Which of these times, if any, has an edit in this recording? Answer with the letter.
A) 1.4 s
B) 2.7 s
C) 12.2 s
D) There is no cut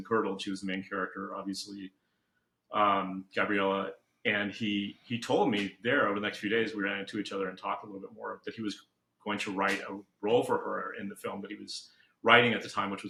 D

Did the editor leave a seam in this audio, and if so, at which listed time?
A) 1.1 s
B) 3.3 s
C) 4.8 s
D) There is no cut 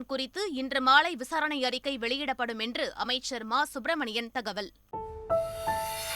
C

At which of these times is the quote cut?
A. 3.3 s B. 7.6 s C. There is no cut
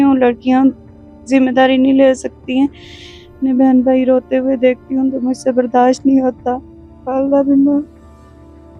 A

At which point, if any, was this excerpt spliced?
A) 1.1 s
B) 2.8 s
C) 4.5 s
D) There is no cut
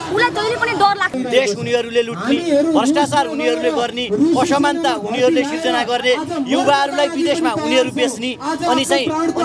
A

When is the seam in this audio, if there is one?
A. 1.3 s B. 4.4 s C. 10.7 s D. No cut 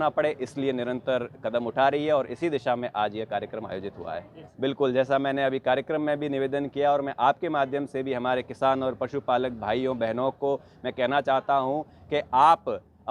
B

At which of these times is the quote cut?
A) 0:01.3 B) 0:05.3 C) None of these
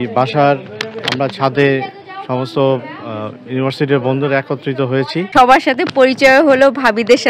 B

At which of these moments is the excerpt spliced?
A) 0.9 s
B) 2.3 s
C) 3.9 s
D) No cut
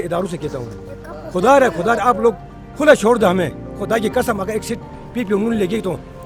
D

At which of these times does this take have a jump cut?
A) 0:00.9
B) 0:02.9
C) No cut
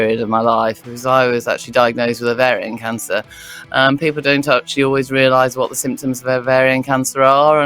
A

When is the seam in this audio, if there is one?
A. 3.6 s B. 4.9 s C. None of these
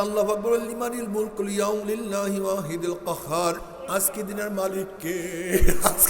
A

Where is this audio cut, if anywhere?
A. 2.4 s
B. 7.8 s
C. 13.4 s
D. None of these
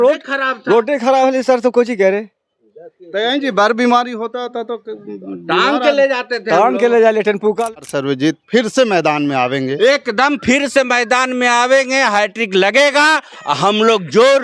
B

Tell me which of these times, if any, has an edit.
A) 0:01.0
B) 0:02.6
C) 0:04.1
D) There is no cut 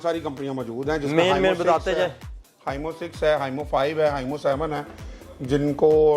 D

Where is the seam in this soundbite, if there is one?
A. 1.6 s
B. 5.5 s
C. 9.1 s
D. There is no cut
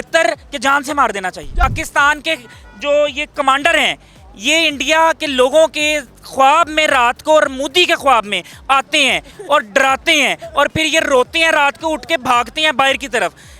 A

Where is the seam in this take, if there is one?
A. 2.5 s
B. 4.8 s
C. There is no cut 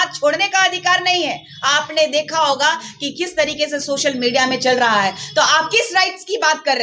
C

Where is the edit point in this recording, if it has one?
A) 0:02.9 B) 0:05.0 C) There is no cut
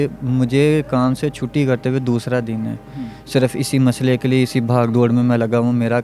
C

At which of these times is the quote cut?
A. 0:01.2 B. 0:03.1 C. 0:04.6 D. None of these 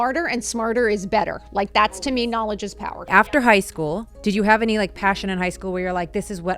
B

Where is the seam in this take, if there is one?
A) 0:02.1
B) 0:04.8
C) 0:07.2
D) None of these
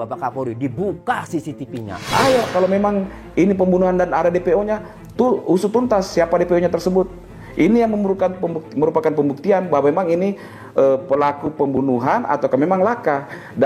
A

